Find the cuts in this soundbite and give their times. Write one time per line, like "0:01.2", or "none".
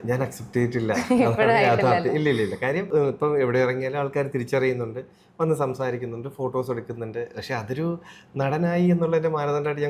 0:02.9